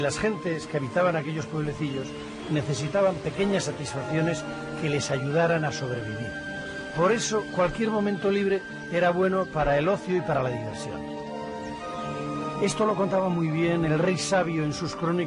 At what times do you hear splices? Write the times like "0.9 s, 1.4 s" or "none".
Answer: none